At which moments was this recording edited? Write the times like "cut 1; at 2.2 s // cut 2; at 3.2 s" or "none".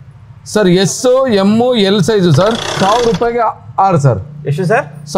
cut 1; at 2.7 s